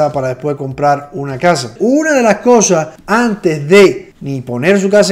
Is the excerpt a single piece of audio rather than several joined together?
no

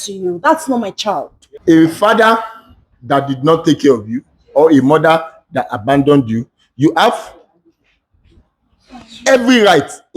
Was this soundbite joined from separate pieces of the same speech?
yes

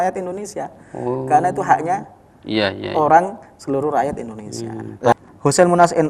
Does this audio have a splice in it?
yes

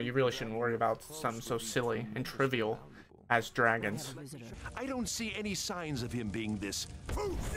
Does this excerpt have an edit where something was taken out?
yes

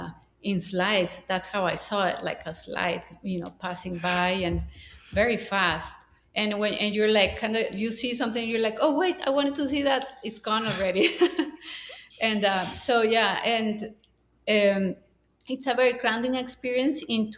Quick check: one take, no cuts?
yes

